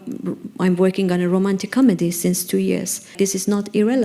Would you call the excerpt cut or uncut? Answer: cut